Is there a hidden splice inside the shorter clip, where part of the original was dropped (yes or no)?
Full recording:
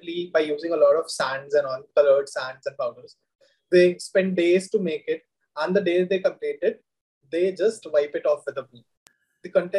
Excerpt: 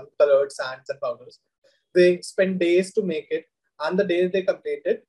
no